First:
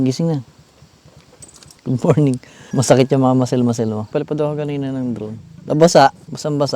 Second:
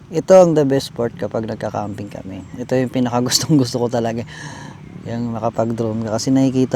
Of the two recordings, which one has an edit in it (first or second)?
first